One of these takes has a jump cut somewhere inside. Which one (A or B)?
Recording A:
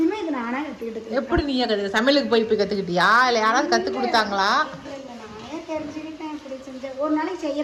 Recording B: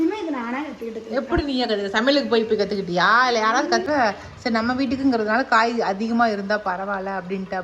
B